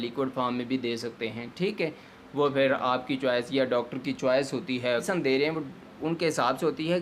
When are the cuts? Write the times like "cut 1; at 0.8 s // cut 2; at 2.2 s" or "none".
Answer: cut 1; at 5.0 s